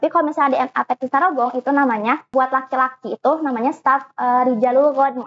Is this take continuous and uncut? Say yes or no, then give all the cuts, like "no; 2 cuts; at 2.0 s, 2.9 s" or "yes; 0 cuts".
no; 1 cut; at 2.3 s